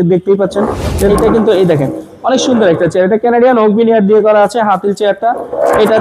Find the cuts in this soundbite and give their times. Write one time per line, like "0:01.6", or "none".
0:01.0